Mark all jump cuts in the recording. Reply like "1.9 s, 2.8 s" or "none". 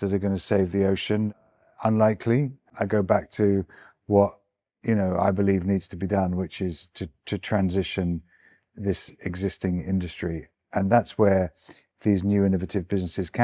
none